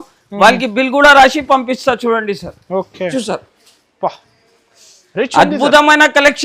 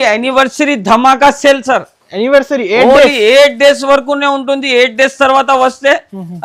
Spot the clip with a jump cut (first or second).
first